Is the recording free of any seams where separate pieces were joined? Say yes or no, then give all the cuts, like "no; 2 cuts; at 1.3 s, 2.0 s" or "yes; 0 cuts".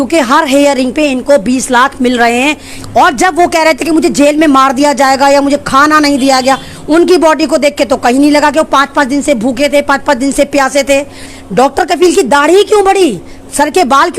no; 2 cuts; at 2.7 s, 11.3 s